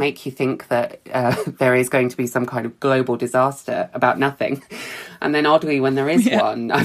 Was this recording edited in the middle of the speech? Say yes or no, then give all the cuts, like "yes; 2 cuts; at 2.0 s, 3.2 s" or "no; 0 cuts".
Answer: no; 0 cuts